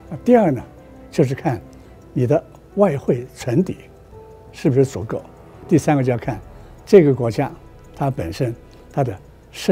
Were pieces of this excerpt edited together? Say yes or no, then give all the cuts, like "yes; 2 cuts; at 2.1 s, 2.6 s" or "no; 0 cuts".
yes; 1 cut; at 5.6 s